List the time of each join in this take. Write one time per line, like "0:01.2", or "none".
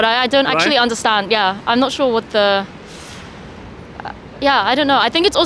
none